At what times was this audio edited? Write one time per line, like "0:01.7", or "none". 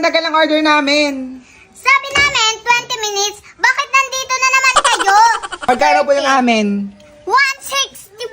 0:05.6